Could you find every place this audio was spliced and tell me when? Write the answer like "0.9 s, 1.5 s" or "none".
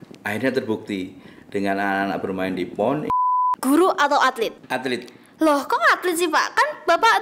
3.1 s, 4.6 s